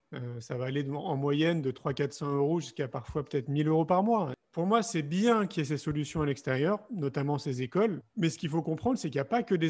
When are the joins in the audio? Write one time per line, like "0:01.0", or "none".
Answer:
0:04.4
0:08.1